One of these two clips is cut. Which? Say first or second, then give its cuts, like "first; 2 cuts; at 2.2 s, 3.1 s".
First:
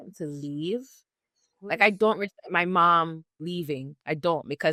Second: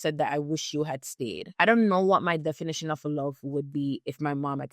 second; 1 cut; at 1.5 s